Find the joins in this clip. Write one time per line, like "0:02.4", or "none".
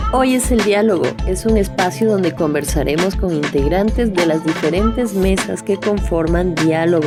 none